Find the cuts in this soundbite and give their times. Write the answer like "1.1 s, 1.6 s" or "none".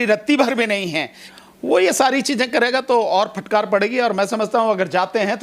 1.2 s